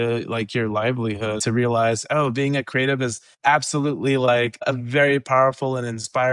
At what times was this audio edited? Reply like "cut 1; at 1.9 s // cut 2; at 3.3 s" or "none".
cut 1; at 1.4 s // cut 2; at 3.2 s // cut 3; at 4.7 s